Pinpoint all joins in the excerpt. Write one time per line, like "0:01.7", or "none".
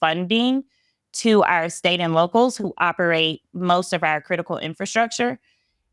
none